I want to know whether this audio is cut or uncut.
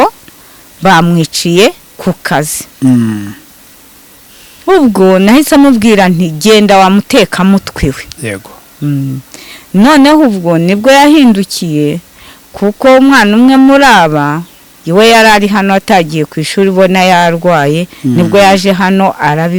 uncut